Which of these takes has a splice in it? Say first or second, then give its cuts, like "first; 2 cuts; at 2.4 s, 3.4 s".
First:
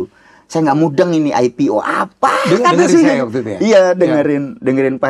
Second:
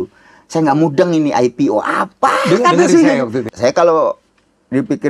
second; 1 cut; at 3.4 s